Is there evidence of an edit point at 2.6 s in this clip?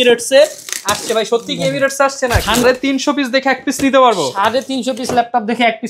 yes; 1 cut; at 2.6 s

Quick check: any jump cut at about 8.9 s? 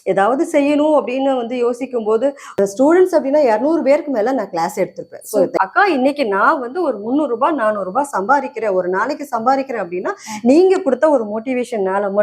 no; 2 cuts; at 2.6 s, 5.5 s

